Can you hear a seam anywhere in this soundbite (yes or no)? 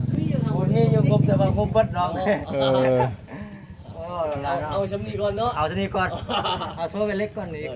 no